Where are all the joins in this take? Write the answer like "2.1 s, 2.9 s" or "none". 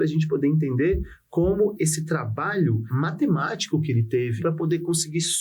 1.7 s, 2.9 s, 4.4 s